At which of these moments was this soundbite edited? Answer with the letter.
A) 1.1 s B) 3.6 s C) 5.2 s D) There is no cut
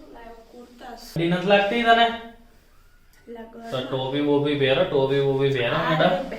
A